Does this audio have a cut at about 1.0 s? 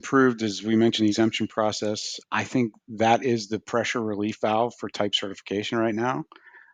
yes; 1 cut; at 1.0 s

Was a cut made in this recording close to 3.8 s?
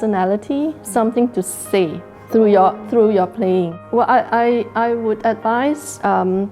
yes; 1 cut; at 3.8 s

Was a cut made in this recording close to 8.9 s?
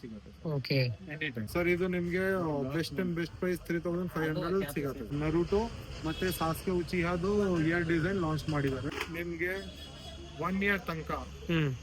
yes; 3 cuts; at 1.4 s, 5.1 s, 8.9 s

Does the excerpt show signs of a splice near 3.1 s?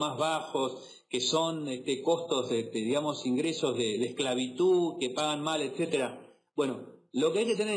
yes; 1 cut; at 3.1 s

